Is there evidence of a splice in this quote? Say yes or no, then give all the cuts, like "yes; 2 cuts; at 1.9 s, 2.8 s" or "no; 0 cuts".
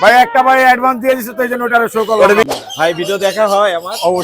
yes; 1 cut; at 2.5 s